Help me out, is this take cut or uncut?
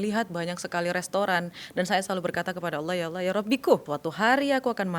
cut